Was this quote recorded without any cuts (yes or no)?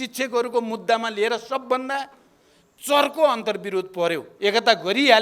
no